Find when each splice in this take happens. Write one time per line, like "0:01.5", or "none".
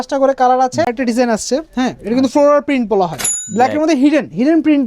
0:00.9
0:03.4